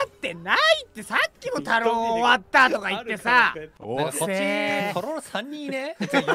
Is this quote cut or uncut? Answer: cut